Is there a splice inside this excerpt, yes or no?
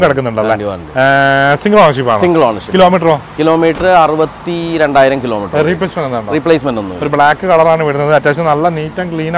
no